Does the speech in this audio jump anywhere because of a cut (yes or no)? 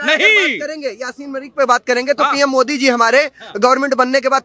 no